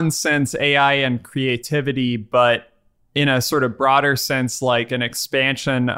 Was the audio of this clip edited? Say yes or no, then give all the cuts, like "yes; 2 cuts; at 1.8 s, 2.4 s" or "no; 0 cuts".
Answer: no; 0 cuts